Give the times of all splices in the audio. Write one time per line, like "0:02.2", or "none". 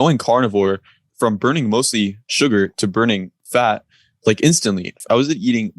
0:01.1
0:02.3
0:03.3
0:05.0